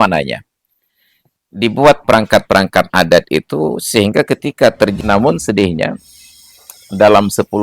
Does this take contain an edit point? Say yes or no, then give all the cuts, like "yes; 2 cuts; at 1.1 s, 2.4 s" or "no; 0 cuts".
yes; 1 cut; at 5.0 s